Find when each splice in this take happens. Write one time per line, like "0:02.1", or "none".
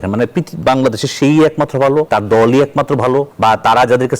0:02.1
0:03.3